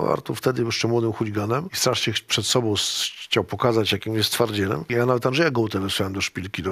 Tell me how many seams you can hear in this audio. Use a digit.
2